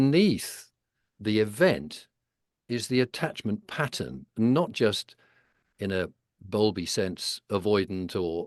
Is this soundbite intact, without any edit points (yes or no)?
yes